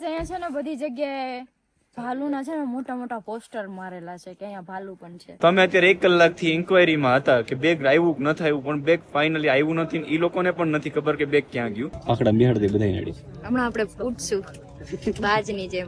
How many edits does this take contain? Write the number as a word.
two